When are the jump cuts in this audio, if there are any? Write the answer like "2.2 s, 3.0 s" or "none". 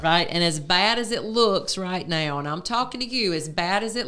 none